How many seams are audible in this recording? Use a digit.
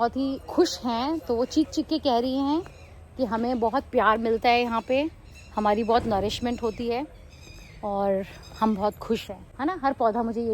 1